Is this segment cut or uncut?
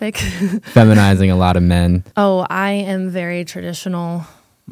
cut